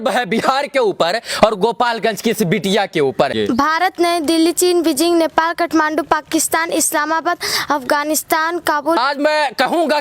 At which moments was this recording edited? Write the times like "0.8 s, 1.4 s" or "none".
3.3 s, 9.0 s